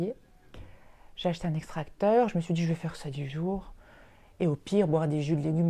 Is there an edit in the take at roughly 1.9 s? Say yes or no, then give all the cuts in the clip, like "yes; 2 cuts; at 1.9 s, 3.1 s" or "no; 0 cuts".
no; 0 cuts